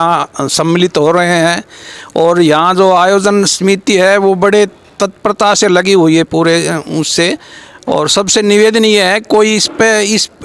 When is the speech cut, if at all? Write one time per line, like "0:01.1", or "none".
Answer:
none